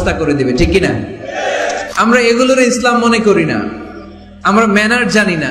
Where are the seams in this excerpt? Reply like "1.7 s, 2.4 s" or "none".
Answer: 1.9 s